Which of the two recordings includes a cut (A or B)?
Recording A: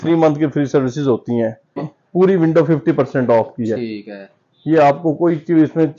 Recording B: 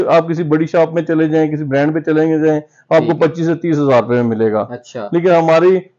A